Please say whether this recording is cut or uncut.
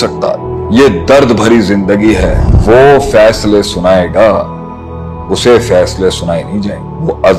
cut